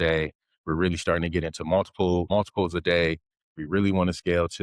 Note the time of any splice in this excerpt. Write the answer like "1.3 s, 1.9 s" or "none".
2.3 s